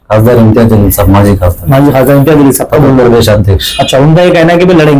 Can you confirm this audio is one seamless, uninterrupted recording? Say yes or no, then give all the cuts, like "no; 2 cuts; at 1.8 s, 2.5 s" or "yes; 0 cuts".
yes; 0 cuts